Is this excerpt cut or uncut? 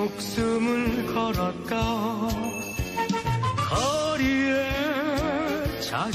uncut